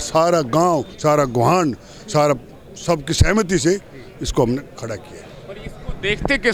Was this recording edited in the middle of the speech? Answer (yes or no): no